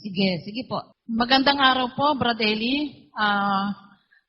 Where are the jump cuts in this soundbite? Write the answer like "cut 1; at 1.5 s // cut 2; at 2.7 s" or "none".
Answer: cut 1; at 0.9 s

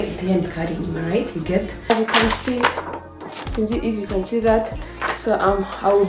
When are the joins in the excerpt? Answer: cut 1; at 1.9 s

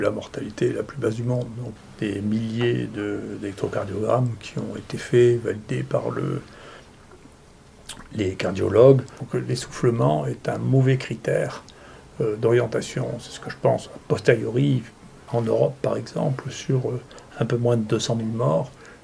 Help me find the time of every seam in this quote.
cut 1; at 1.6 s // cut 2; at 9.2 s // cut 3; at 15.2 s

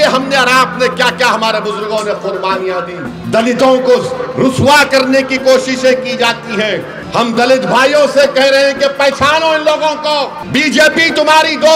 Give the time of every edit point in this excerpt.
cut 1; at 3.1 s // cut 2; at 7.0 s // cut 3; at 10.4 s

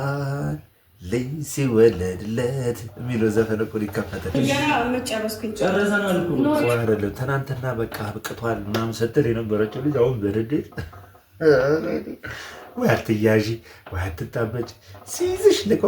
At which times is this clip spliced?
cut 1; at 4.3 s

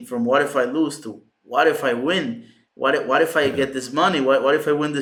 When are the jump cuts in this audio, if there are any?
none

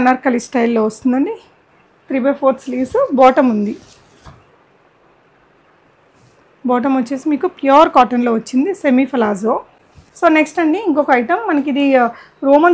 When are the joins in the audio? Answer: none

